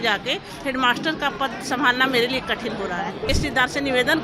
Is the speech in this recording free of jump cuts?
no; 1 cut; at 3.3 s

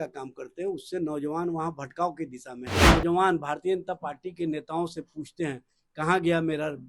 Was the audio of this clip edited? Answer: yes; 1 cut; at 2.8 s

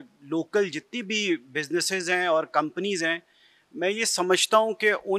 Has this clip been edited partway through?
no; 0 cuts

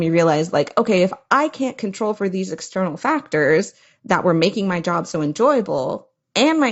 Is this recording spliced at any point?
no; 0 cuts

